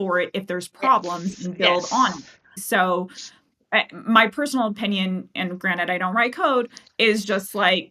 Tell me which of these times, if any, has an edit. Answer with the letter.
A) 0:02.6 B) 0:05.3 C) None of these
A